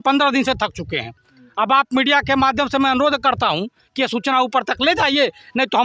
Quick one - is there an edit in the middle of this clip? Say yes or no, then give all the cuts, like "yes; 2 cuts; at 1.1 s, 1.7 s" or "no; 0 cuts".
no; 0 cuts